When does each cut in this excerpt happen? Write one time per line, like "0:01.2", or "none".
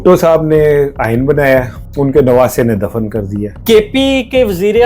0:01.8
0:03.5

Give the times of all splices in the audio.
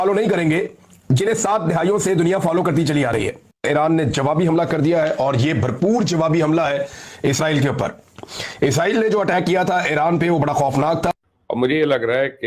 0:03.6
0:11.1

